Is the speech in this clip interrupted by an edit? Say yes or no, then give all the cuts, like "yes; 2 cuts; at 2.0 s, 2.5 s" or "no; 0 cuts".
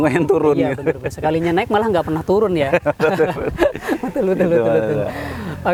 no; 0 cuts